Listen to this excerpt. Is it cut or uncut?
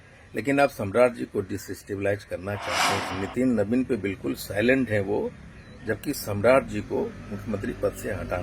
cut